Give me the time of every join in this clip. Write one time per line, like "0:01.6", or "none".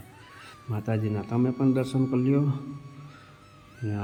none